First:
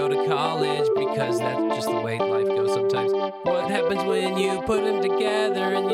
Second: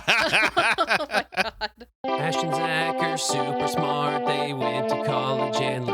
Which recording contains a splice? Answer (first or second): second